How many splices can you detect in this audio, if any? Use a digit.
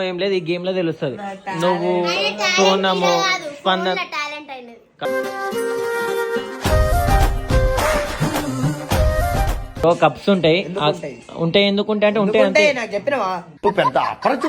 1